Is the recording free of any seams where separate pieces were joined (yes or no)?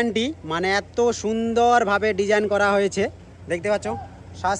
yes